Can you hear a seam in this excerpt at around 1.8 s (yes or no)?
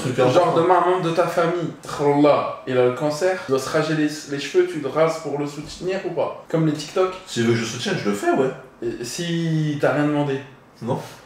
no